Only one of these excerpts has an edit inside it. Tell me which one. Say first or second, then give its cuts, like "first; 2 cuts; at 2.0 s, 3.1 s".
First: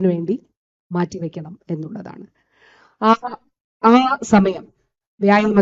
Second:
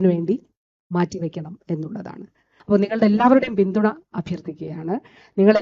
second; 1 cut; at 2.5 s